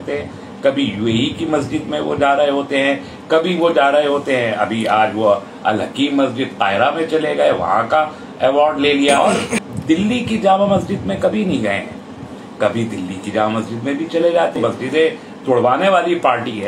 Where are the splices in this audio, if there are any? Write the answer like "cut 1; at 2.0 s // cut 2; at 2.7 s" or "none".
cut 1; at 9.2 s // cut 2; at 14.6 s